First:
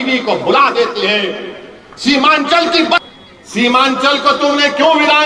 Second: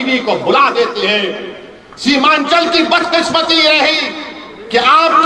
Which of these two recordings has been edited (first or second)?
first